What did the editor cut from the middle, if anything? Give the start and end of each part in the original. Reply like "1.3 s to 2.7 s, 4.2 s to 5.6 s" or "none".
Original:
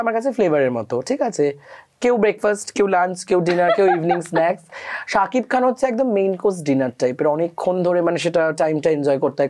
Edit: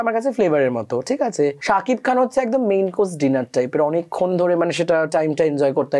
1.6 s to 5.0 s